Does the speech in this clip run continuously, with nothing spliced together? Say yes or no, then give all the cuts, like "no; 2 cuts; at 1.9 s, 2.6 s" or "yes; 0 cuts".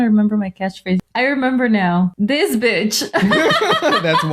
no; 2 cuts; at 1.0 s, 2.1 s